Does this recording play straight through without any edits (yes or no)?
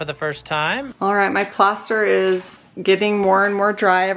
no